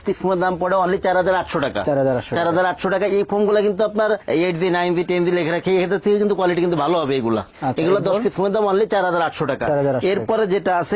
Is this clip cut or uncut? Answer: uncut